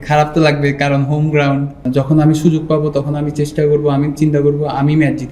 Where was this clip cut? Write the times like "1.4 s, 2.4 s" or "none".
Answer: 1.9 s